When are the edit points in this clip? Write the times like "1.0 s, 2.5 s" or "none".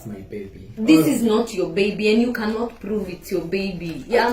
none